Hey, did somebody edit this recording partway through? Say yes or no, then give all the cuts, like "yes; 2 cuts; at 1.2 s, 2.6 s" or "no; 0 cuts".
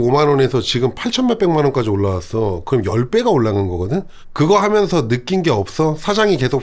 no; 0 cuts